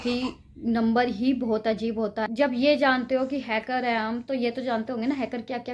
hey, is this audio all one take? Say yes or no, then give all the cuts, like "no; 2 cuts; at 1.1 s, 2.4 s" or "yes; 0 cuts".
no; 1 cut; at 2.2 s